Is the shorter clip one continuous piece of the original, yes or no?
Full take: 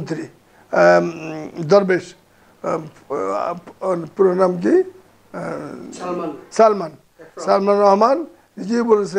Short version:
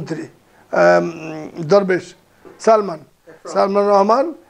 no